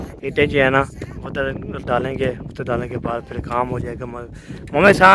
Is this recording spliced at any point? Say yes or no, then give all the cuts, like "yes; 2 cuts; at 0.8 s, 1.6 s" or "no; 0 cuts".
no; 0 cuts